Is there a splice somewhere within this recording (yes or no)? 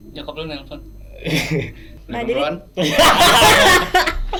no